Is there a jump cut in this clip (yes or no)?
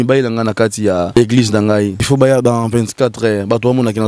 yes